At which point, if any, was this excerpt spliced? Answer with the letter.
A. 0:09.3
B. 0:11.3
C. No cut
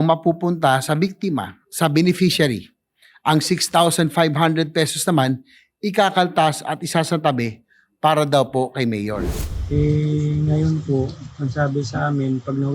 A